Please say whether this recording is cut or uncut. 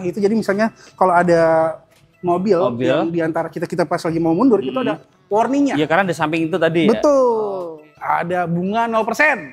cut